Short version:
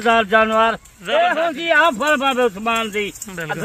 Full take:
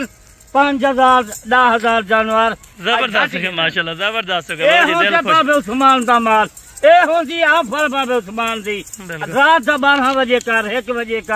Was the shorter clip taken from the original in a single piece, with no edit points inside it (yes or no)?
no